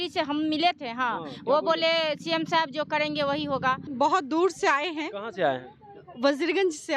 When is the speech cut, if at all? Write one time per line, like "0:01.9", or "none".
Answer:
0:03.9